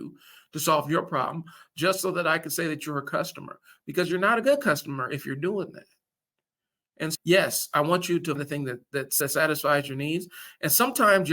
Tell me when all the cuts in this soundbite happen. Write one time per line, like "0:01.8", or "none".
0:08.4